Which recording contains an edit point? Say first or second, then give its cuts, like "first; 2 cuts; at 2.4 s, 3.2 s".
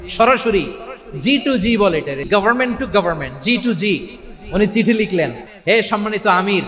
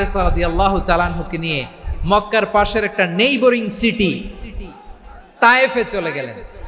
first; 2 cuts; at 2.2 s, 5.5 s